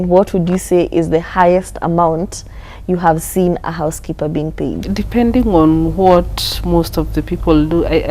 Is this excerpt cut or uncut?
cut